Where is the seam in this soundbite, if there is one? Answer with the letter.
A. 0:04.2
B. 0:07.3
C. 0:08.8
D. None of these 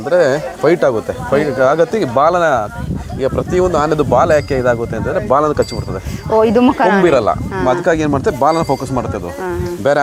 D